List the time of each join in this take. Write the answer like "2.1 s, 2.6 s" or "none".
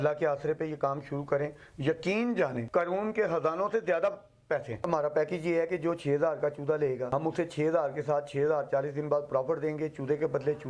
2.6 s, 4.8 s, 7.0 s